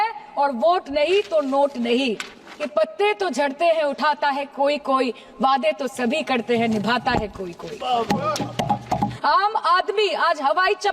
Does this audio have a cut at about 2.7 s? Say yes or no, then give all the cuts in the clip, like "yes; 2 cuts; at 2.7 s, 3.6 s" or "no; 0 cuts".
yes; 2 cuts; at 2.7 s, 9.1 s